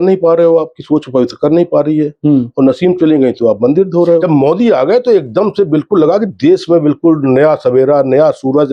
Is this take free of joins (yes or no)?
no